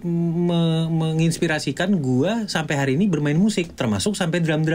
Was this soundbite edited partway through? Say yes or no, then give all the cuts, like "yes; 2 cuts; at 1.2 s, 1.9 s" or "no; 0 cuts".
no; 0 cuts